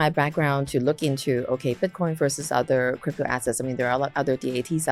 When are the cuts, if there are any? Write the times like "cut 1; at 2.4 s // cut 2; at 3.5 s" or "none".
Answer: none